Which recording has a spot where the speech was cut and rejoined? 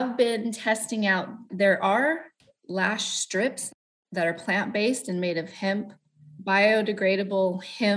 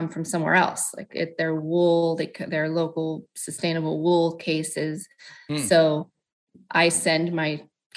first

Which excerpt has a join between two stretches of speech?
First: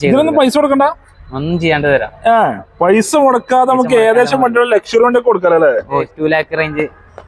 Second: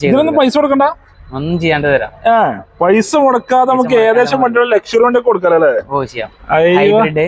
first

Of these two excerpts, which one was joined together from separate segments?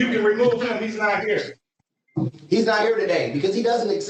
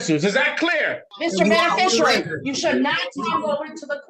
second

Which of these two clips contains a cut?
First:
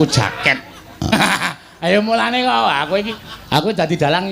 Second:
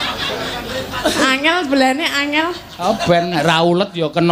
first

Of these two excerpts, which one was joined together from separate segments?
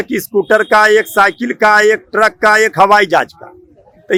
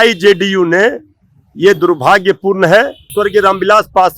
second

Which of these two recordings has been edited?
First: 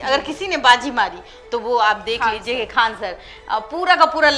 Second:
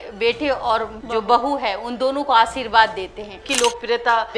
second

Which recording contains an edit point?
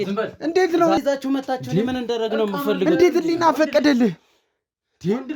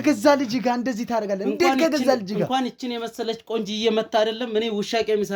first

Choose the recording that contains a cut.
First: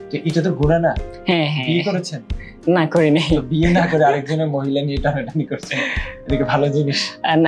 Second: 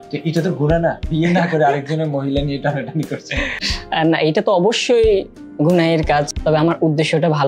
second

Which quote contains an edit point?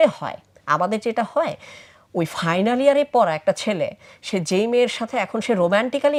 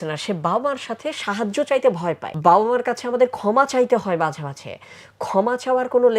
second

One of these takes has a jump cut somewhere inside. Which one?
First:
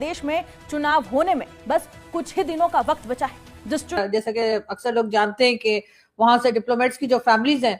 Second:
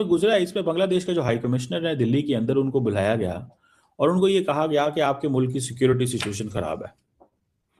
first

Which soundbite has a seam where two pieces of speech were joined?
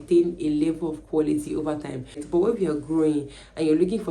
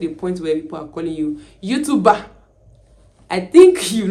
first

